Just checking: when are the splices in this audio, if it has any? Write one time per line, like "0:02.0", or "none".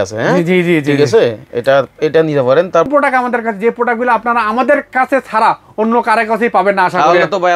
0:02.9